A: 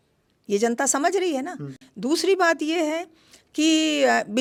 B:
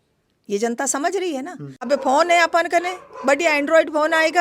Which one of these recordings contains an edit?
B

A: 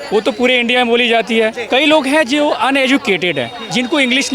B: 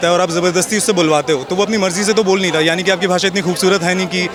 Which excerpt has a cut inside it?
A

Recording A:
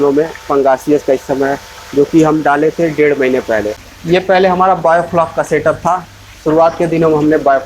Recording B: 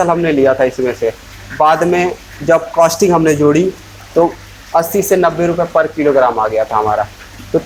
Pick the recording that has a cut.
A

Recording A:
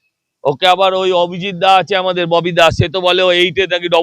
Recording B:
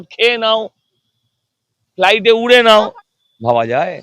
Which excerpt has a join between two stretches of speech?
B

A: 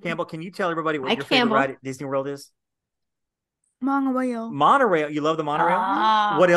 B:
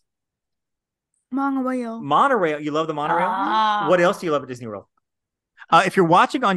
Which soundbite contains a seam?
B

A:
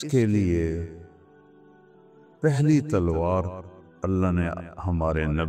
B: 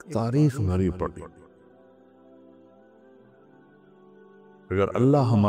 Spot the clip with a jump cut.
B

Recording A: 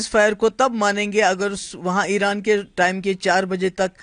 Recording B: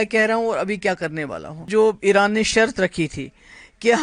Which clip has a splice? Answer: B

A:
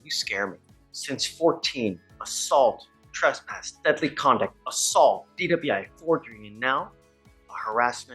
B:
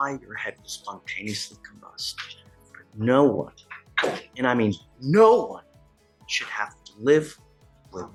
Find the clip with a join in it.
A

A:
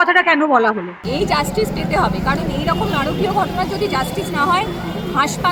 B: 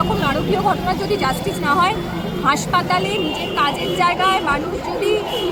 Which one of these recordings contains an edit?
A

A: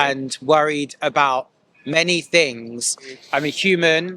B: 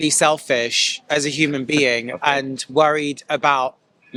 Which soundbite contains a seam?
A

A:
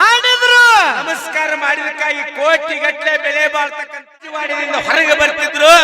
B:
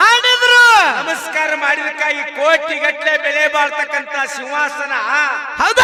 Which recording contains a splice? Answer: A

